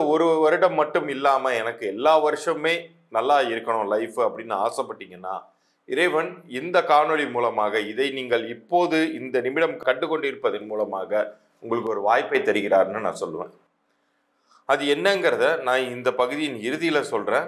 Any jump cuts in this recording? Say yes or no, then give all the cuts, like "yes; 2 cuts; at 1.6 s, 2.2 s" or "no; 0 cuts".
no; 0 cuts